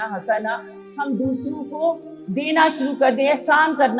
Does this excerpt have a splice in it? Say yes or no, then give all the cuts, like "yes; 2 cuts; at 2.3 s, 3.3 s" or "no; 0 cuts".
yes; 1 cut; at 2.1 s